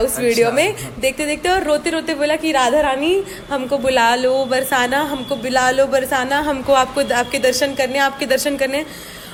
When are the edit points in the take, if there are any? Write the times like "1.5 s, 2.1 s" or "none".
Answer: none